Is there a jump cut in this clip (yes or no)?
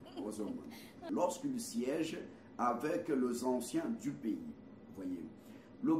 yes